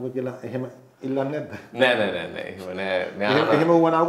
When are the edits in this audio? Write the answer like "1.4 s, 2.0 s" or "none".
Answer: none